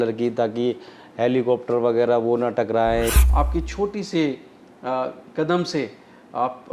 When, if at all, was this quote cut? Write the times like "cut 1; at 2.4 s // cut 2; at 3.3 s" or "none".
cut 1; at 3.1 s